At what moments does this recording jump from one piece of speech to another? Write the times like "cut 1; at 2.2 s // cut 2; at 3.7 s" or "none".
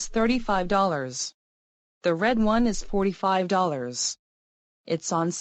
none